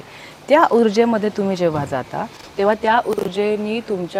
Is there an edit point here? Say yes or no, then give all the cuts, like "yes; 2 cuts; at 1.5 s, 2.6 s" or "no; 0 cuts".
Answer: no; 0 cuts